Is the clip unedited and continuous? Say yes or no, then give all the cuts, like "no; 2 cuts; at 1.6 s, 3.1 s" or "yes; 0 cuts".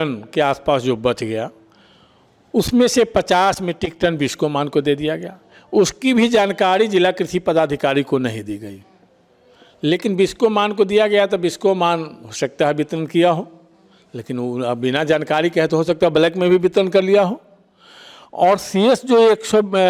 yes; 0 cuts